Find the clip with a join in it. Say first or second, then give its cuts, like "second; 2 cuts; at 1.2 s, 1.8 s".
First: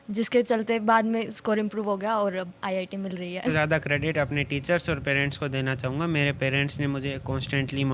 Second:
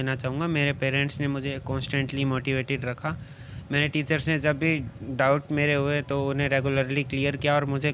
first; 1 cut; at 3.5 s